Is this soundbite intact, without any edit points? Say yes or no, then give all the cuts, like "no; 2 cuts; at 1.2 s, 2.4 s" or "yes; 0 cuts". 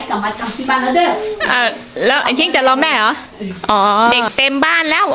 no; 1 cut; at 4.2 s